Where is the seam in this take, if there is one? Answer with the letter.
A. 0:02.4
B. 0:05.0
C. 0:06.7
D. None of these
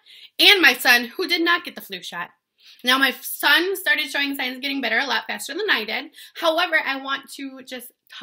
D